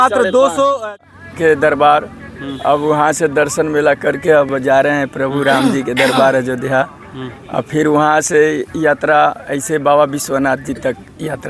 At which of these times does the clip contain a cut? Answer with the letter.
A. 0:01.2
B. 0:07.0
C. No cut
A